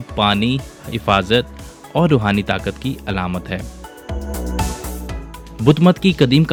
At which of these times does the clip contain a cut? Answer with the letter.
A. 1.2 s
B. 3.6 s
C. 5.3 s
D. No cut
D